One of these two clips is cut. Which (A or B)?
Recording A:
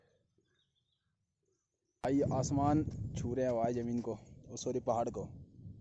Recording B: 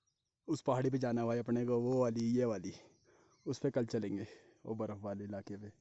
A